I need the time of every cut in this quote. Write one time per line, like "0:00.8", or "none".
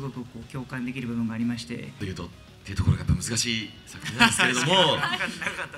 0:02.0